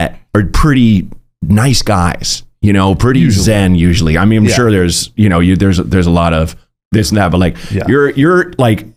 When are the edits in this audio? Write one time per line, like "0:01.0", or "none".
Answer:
none

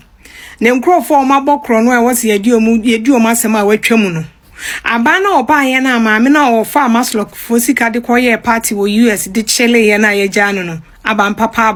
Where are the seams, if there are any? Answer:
none

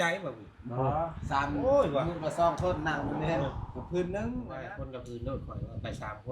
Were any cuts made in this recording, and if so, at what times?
0:04.6

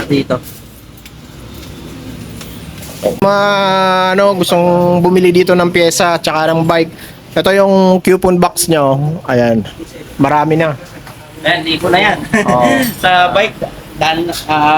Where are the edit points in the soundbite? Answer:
0:03.2

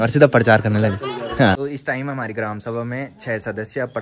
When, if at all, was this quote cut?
0:01.5

